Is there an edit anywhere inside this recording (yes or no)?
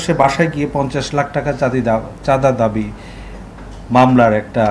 no